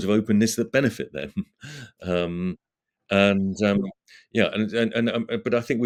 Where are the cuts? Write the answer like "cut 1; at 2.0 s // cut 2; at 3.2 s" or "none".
none